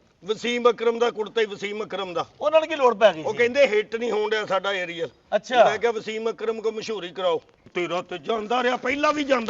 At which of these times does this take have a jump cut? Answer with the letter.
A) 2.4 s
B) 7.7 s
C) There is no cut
B